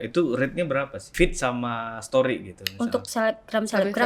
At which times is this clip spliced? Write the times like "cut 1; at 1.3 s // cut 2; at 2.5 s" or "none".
cut 1; at 1.0 s